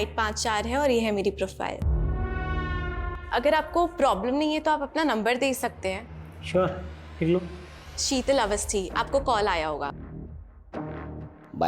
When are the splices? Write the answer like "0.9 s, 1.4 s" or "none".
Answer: 3.1 s